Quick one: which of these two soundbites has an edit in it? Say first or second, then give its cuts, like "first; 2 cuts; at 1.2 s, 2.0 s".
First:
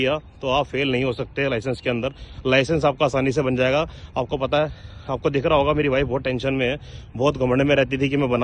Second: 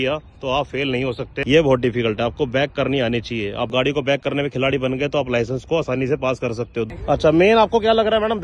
second; 2 cuts; at 1.3 s, 6.9 s